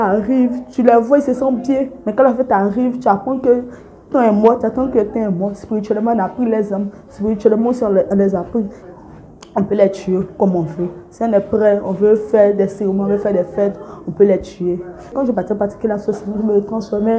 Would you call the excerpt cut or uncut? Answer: cut